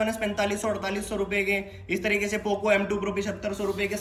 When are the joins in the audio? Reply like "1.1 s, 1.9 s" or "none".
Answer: none